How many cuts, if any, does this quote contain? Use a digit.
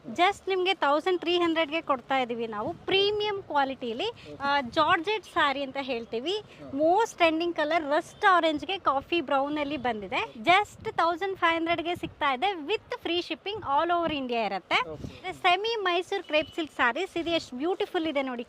3